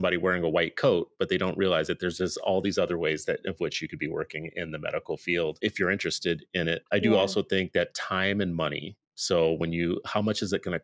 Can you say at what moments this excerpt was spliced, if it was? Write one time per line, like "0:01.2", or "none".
0:05.6
0:06.8